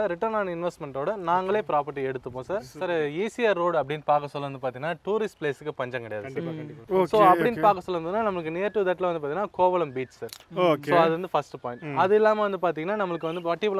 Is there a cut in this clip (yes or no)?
yes